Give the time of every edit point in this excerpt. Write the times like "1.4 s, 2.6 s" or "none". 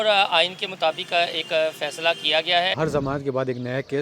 2.7 s